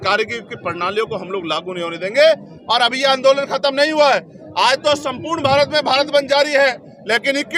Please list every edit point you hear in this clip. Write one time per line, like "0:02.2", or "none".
none